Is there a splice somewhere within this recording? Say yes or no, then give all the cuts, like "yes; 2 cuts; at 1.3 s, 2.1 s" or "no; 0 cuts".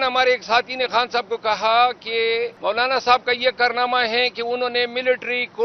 yes; 1 cut; at 2.5 s